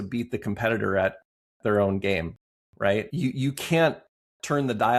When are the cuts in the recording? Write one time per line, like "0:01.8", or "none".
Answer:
0:03.1